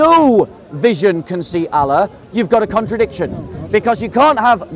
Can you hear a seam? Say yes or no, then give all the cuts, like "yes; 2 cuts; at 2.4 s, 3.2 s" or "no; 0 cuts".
no; 0 cuts